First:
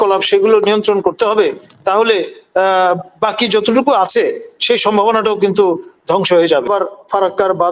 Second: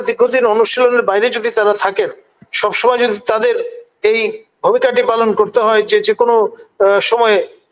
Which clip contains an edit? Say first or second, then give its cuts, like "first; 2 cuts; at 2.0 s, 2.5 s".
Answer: first; 1 cut; at 6.7 s